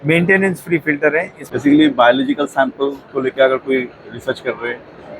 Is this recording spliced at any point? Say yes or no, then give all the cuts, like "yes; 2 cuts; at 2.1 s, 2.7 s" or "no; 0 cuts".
yes; 1 cut; at 1.1 s